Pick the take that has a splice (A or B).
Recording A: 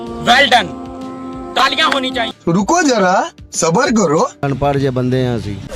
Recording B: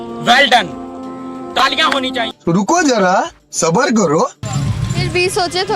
A